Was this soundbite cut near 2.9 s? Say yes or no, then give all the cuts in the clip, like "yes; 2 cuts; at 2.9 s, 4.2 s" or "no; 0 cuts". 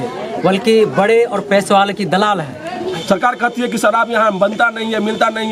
yes; 1 cut; at 2.9 s